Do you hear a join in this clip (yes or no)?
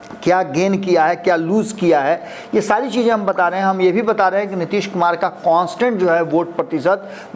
no